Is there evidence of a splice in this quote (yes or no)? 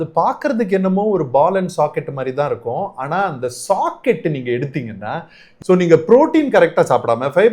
yes